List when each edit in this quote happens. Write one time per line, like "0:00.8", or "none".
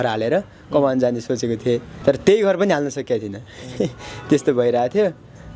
0:01.9